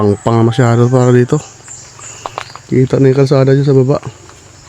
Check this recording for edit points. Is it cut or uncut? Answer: uncut